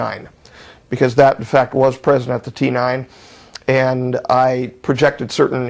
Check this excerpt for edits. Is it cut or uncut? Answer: uncut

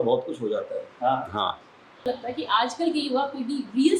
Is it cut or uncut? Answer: cut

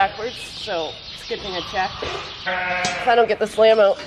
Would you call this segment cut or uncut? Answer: cut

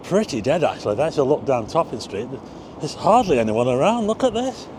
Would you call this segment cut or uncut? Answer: uncut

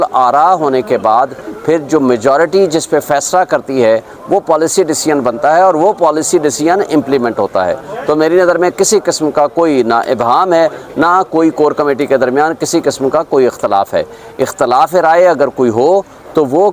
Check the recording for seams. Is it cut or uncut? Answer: uncut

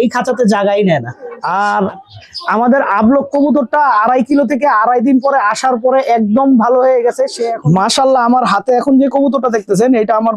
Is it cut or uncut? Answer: cut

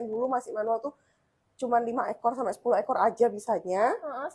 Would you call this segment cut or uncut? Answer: uncut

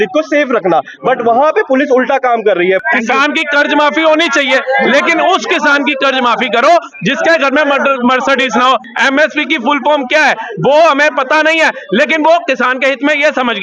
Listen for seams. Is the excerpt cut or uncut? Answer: cut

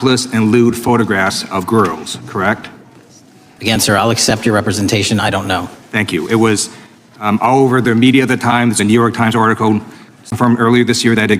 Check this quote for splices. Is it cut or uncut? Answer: cut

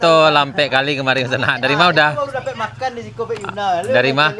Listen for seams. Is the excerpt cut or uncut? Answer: uncut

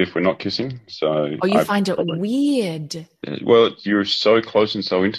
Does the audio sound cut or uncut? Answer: uncut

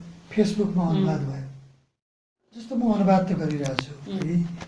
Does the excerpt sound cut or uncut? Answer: cut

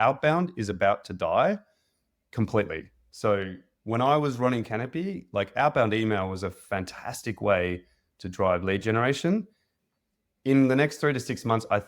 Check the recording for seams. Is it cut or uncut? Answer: uncut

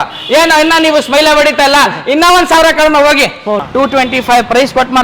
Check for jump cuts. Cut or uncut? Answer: cut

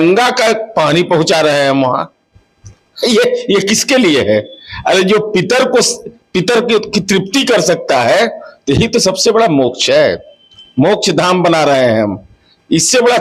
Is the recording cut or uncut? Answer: uncut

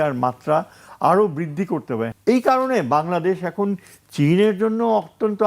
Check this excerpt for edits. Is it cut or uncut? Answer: cut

